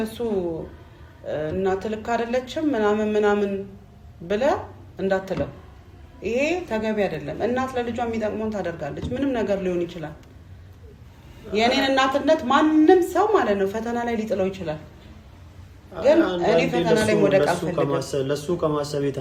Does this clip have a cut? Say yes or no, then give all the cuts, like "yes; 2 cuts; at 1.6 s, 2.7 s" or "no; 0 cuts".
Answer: no; 0 cuts